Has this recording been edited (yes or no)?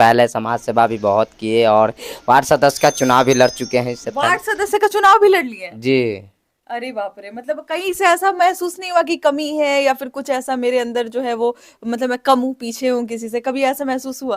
no